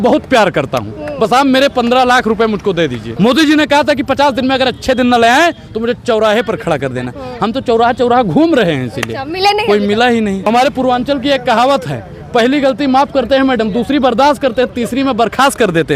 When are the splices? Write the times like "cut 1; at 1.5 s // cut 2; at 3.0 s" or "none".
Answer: cut 1; at 3.0 s // cut 2; at 10.5 s